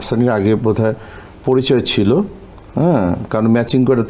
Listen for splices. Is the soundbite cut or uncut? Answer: uncut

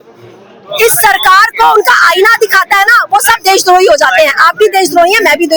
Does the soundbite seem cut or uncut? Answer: uncut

